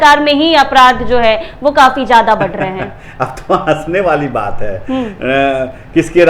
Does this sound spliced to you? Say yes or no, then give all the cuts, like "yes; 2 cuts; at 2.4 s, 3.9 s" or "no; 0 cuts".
no; 0 cuts